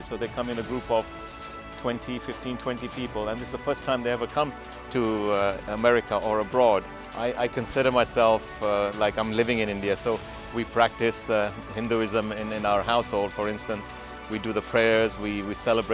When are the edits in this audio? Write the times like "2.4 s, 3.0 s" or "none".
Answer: 6.9 s